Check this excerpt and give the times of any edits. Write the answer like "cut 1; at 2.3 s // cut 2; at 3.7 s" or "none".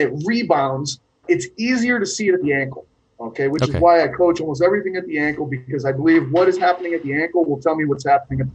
cut 1; at 1.2 s